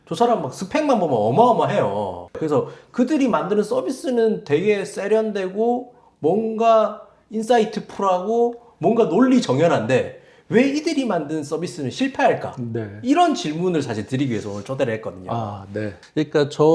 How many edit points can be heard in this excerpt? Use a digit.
0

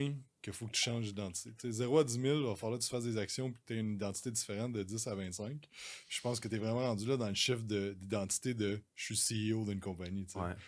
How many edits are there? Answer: 0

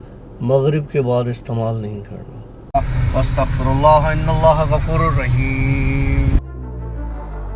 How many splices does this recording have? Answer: 1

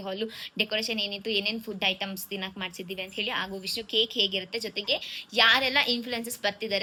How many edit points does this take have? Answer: 0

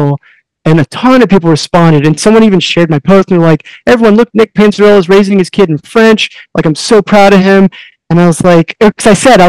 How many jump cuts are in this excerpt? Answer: 0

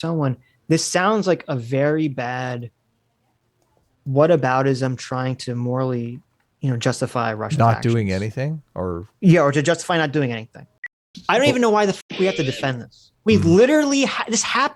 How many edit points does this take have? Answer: 1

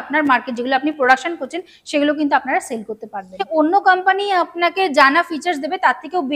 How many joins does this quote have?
1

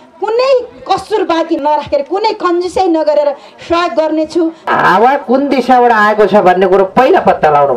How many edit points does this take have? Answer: 2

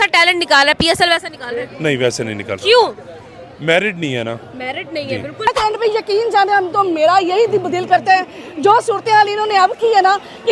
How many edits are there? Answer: 1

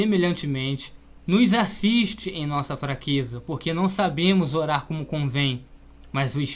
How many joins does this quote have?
1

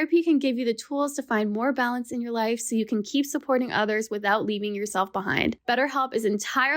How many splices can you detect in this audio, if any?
1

